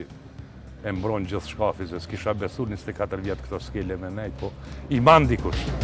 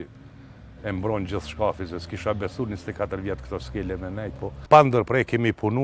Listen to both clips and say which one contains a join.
second; 1 cut; at 4.6 s

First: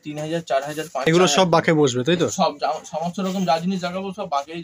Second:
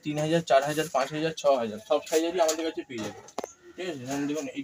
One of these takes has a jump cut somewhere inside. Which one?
first; 1 cut; at 0.9 s

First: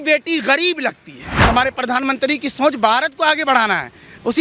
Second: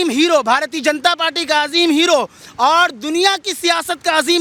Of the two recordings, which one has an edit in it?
first; 1 cut; at 1.3 s

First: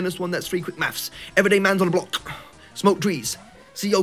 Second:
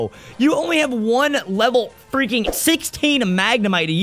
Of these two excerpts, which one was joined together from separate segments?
second; 1 cut; at 2.5 s

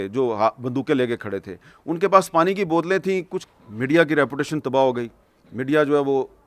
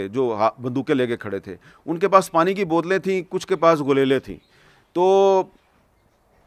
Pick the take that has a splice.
first; 1 cut; at 3.3 s

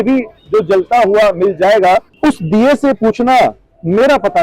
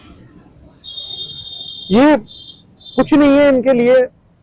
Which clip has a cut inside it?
first; 1 cut; at 2.1 s

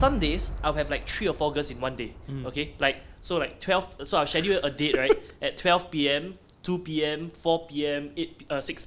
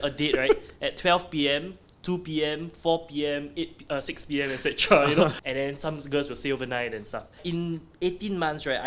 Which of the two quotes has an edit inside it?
second; 2 cuts; at 5.4 s, 7.4 s

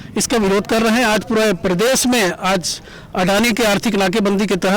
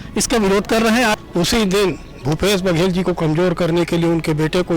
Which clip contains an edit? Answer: second; 1 cut; at 1.2 s

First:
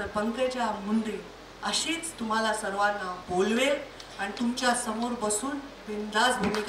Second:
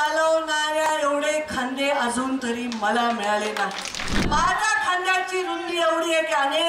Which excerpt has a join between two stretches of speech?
second; 1 cut; at 4.1 s

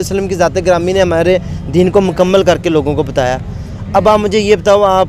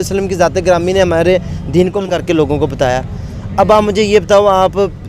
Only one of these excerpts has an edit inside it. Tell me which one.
second; 1 cut; at 2.1 s

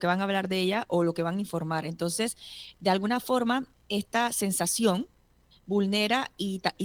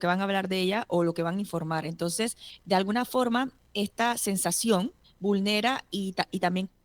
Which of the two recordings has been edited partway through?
second; 2 cuts; at 2.5 s, 5.0 s

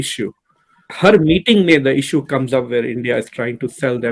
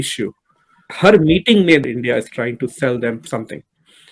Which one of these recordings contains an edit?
second; 1 cut; at 1.8 s

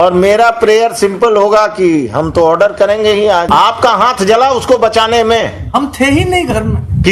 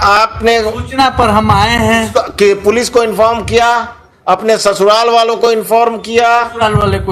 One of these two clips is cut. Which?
first; 1 cut; at 3.5 s

